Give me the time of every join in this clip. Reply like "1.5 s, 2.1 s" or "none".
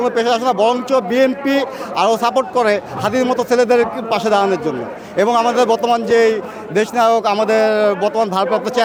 none